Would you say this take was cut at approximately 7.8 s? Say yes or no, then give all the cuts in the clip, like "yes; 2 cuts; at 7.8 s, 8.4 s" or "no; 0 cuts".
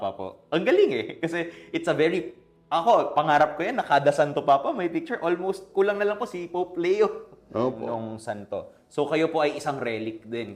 yes; 1 cut; at 7.8 s